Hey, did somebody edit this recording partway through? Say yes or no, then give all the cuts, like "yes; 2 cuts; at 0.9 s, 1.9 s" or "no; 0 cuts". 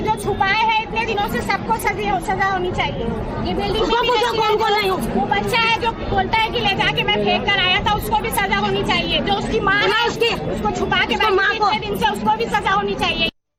no; 0 cuts